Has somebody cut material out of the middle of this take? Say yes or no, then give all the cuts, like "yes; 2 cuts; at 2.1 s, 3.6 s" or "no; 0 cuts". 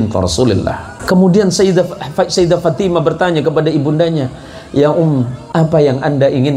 yes; 2 cuts; at 0.9 s, 5.4 s